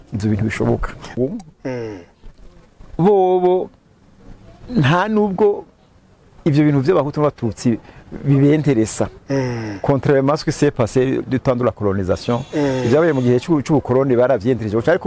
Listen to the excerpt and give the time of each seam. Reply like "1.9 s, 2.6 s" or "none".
1.1 s